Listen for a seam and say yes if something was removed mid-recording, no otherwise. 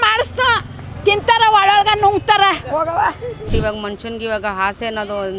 yes